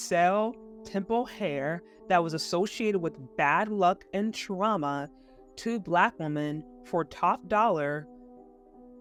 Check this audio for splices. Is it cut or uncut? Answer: uncut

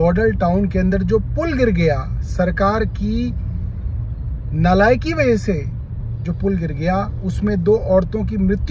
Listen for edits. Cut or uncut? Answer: uncut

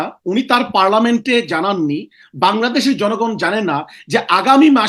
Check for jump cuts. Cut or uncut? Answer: uncut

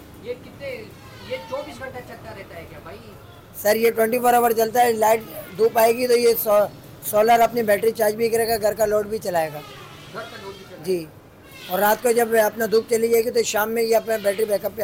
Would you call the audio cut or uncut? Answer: uncut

